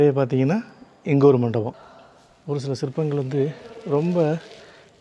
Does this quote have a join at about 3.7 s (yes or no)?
no